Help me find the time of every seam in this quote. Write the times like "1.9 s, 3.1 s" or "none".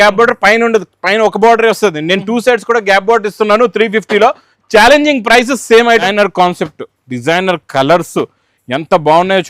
6.1 s